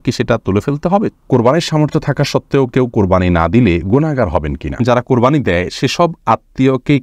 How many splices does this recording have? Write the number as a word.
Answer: two